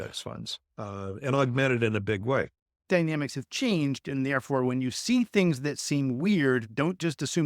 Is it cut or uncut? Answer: cut